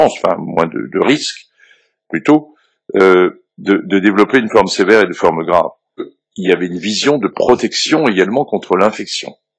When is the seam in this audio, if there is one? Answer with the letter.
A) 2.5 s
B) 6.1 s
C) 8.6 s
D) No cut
B